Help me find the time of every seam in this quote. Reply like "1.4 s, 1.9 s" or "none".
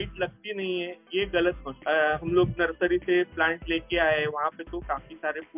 1.8 s